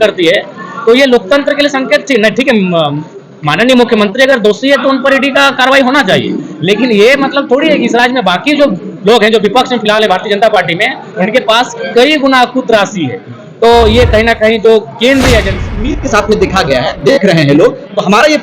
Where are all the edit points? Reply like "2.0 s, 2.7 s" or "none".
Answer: 16.0 s